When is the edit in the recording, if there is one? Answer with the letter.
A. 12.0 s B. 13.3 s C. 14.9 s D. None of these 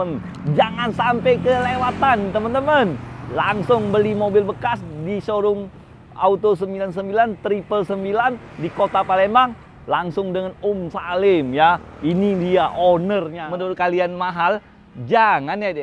B